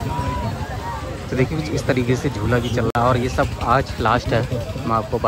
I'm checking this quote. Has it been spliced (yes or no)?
no